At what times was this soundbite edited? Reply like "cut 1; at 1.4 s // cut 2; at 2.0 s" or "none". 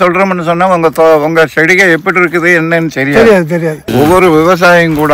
cut 1; at 3.8 s